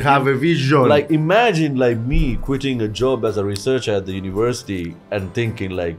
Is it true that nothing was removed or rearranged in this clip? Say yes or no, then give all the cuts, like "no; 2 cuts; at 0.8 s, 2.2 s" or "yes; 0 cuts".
yes; 0 cuts